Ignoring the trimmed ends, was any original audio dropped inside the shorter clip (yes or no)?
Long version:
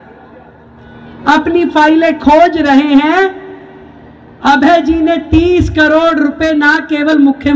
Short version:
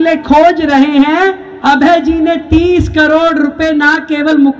yes